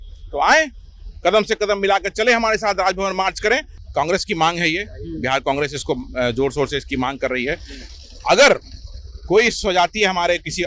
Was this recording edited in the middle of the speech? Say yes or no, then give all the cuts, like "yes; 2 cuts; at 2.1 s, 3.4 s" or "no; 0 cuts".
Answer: yes; 1 cut; at 3.8 s